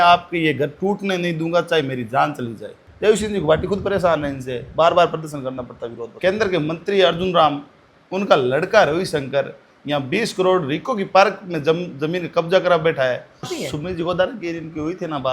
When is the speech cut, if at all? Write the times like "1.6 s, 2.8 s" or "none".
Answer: 2.8 s, 6.1 s, 13.5 s